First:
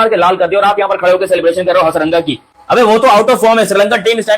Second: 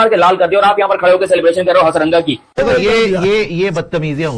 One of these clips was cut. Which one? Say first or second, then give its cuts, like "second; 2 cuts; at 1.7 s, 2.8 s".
second; 1 cut; at 2.4 s